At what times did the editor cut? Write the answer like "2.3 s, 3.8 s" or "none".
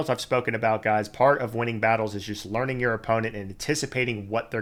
none